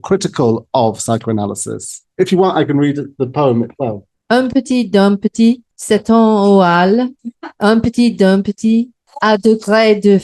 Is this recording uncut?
no; 1 cut; at 9.0 s

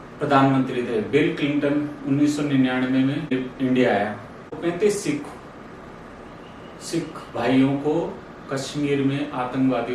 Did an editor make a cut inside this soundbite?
yes; 2 cuts; at 3.3 s, 4.6 s

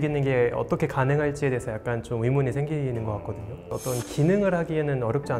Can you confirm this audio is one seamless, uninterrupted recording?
yes; 0 cuts

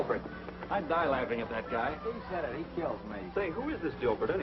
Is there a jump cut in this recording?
yes; 1 cut; at 2.3 s

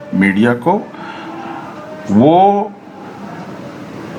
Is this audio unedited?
yes; 0 cuts

